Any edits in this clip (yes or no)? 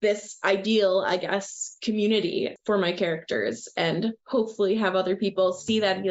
no